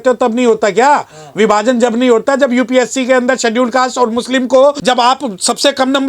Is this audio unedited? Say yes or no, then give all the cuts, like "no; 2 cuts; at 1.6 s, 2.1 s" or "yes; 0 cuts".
no; 1 cut; at 4.8 s